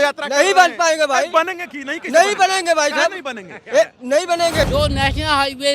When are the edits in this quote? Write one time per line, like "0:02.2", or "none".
0:04.7